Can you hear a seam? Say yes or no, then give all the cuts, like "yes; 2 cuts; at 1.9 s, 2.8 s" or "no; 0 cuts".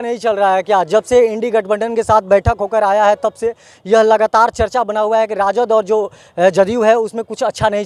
no; 0 cuts